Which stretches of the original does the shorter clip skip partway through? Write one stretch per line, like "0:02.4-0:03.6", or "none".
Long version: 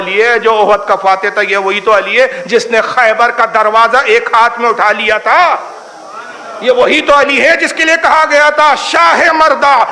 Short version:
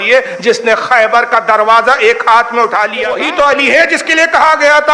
0:05.2-0:06.8